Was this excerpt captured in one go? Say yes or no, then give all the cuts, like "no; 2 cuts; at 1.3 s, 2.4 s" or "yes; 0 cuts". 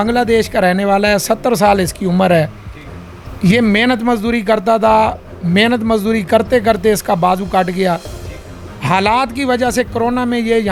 yes; 0 cuts